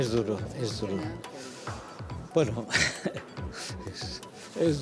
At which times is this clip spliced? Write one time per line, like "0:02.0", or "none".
none